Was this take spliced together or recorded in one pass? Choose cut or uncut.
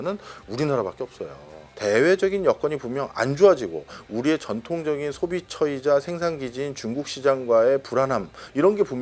uncut